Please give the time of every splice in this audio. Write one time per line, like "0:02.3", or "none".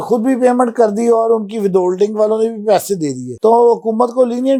none